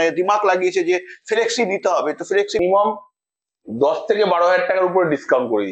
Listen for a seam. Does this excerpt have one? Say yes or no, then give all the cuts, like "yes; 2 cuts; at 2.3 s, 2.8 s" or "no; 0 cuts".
yes; 1 cut; at 2.6 s